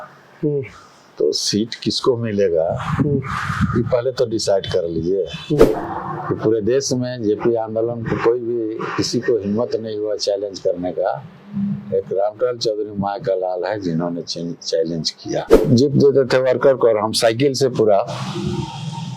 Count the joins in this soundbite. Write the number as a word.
two